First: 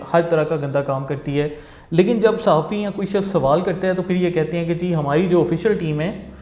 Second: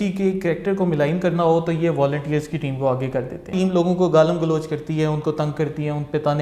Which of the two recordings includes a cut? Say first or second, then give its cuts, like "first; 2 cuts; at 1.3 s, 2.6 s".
second; 1 cut; at 3.5 s